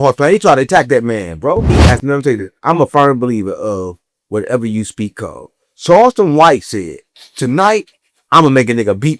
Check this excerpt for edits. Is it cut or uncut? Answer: cut